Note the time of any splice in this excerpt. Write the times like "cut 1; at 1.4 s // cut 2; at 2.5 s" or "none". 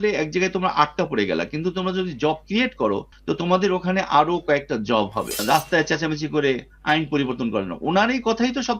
cut 1; at 5.4 s